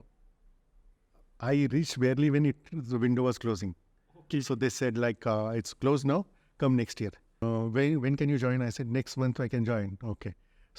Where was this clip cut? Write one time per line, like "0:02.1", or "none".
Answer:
0:07.3